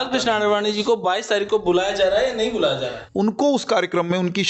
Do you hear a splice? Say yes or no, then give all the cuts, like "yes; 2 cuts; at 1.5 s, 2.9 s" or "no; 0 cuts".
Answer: yes; 1 cut; at 3.0 s